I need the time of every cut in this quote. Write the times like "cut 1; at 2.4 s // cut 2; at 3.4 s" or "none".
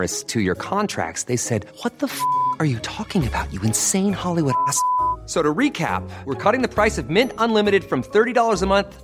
none